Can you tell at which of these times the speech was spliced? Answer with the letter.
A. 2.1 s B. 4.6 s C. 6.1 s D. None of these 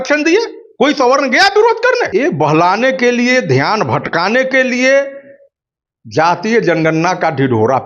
A